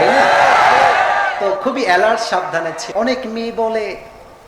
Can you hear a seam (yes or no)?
yes